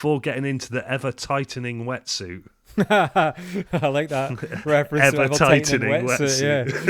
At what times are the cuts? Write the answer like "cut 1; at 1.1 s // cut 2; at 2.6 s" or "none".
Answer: none